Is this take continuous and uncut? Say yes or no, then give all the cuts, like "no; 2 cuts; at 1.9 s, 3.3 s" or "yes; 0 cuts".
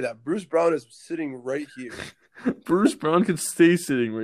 yes; 0 cuts